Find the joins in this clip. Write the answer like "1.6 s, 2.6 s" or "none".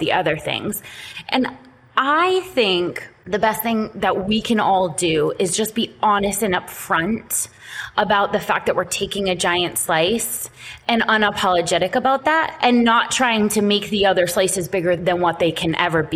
15.0 s